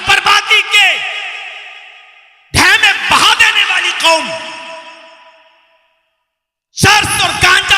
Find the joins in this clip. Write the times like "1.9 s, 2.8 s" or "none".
none